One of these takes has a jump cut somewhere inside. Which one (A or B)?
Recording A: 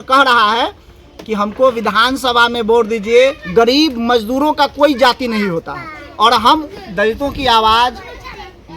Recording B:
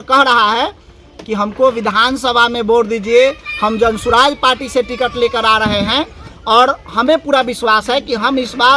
A